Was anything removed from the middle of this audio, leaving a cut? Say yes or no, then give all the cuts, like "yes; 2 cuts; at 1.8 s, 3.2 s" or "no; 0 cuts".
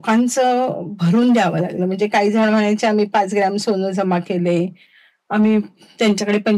no; 0 cuts